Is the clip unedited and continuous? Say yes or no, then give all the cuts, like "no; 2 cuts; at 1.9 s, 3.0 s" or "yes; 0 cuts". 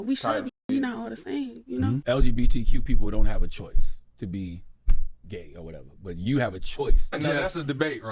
no; 1 cut; at 2.0 s